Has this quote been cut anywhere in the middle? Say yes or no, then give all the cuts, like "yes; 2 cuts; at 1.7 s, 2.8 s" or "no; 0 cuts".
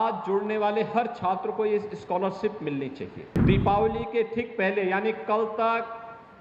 yes; 1 cut; at 3.2 s